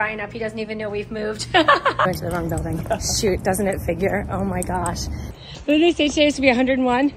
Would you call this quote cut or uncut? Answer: cut